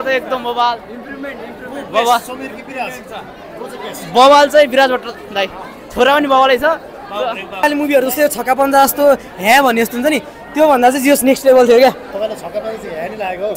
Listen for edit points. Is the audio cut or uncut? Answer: cut